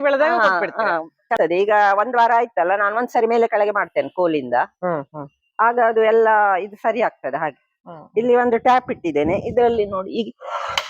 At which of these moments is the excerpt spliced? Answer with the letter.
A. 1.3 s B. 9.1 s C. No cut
A